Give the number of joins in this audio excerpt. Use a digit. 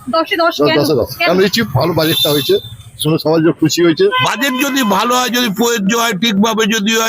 1